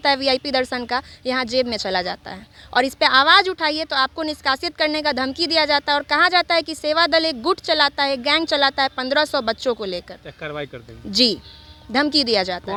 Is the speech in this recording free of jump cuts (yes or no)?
yes